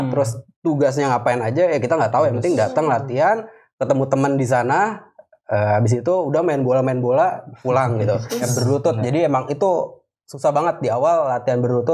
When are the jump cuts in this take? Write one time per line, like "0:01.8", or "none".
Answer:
0:08.4